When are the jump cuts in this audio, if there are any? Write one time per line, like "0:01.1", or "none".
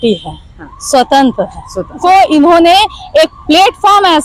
0:02.0